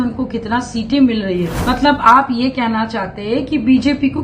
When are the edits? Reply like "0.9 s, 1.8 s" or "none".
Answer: 1.5 s